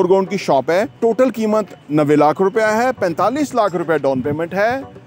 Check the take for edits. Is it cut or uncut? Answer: cut